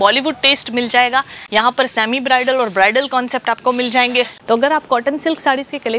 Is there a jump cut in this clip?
yes; 2 cuts; at 1.4 s, 4.4 s

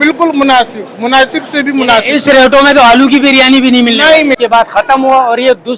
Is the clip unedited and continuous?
no; 1 cut; at 4.4 s

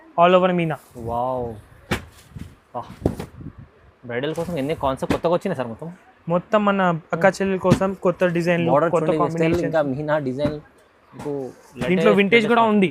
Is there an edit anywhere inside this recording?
no; 0 cuts

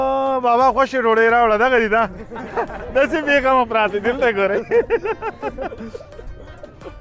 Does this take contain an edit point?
no; 0 cuts

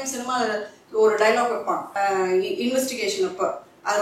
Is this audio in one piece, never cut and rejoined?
no; 1 cut; at 1.9 s

